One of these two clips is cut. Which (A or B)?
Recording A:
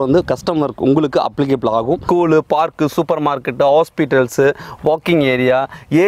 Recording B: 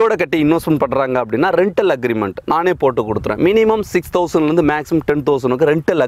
A